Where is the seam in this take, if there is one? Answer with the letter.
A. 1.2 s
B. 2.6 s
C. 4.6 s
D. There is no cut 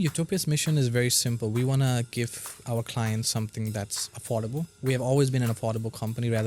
C